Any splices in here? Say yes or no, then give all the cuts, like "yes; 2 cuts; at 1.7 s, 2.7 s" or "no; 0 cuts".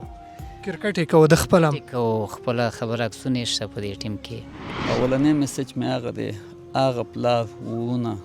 yes; 1 cut; at 4.6 s